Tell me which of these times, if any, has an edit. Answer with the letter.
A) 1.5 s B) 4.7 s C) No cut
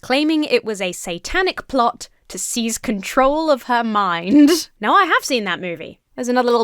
C